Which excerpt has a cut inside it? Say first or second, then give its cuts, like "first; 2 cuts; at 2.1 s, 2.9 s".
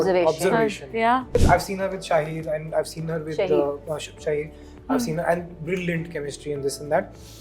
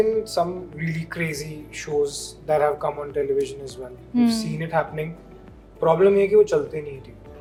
first; 1 cut; at 1.4 s